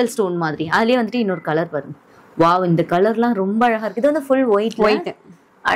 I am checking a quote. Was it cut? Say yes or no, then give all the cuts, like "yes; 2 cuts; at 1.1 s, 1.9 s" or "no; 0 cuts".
no; 0 cuts